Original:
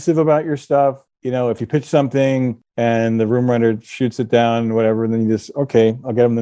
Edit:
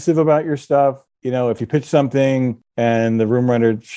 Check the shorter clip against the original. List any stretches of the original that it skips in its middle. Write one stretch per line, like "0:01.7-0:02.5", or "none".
none